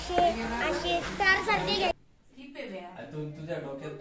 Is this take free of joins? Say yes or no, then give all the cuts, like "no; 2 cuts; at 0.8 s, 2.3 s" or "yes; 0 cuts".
no; 1 cut; at 1.9 s